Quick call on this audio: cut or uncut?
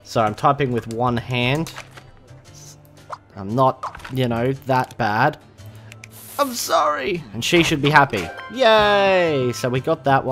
cut